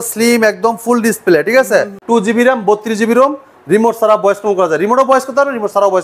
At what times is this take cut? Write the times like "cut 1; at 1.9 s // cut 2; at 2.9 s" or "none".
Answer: cut 1; at 2.0 s